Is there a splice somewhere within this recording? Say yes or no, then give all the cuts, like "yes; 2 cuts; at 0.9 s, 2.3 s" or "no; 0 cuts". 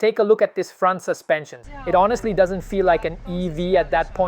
yes; 1 cut; at 1.6 s